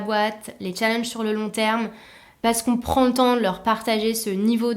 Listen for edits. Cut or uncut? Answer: cut